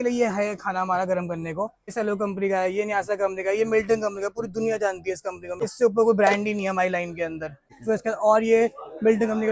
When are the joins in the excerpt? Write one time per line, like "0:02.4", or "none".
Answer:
0:01.9
0:05.6
0:07.4